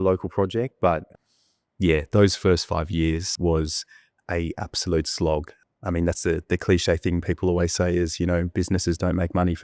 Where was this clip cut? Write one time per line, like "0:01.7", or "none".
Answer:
0:01.1
0:03.3
0:05.5